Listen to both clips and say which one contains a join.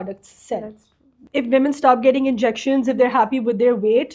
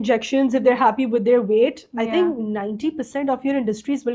first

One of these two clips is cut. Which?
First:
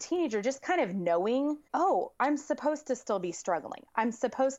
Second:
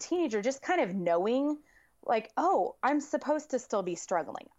first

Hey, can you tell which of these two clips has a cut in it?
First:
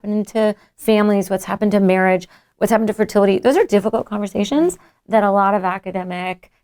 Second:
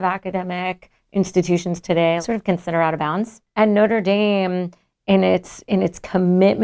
second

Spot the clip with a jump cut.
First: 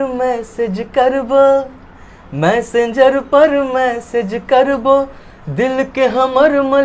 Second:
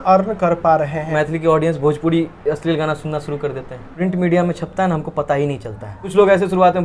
second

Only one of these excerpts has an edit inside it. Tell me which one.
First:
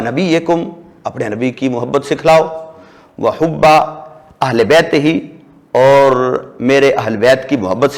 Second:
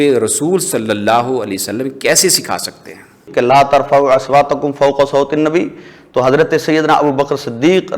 second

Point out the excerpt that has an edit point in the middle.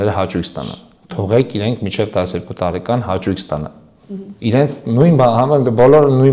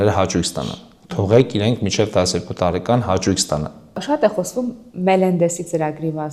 second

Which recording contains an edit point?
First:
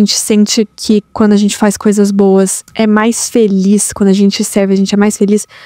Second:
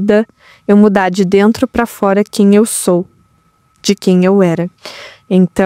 first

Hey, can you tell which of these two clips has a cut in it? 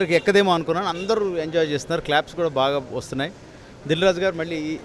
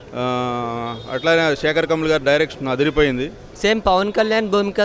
second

